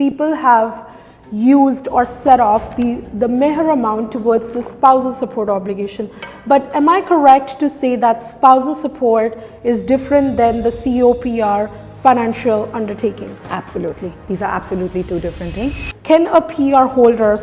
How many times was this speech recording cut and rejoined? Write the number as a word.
one